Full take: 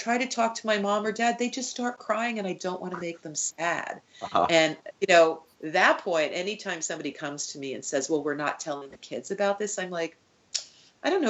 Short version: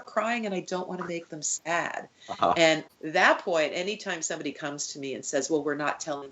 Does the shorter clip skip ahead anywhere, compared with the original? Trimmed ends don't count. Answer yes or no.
yes